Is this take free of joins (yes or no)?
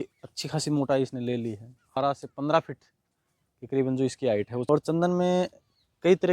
no